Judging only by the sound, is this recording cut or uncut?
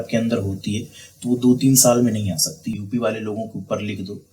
cut